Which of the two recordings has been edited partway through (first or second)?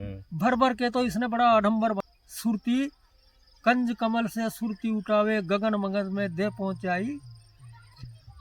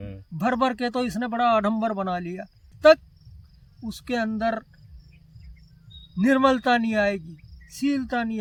first